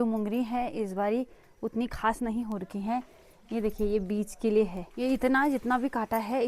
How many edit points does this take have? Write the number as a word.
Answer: one